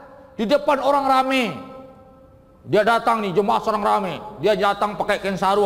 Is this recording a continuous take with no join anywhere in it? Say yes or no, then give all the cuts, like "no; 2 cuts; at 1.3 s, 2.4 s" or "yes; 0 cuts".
yes; 0 cuts